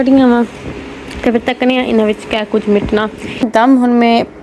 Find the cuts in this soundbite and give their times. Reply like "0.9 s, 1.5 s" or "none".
3.5 s